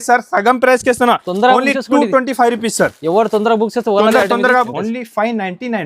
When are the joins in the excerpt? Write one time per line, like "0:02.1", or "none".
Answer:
0:04.7

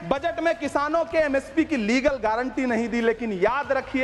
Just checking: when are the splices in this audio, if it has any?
none

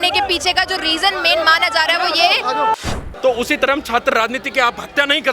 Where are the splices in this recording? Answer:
0:02.8

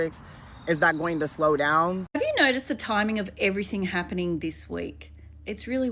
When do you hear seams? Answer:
0:02.1

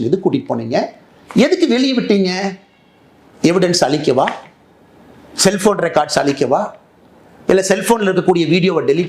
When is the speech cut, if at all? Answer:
none

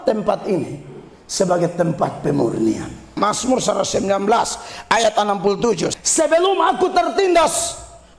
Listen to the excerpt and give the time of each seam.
0:03.1
0:05.9

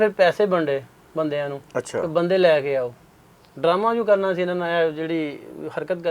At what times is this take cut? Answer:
none

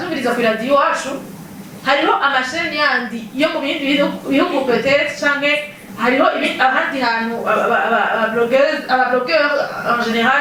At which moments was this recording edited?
none

